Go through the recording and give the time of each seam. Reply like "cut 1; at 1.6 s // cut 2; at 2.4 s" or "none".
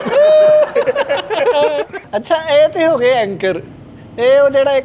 cut 1; at 2.0 s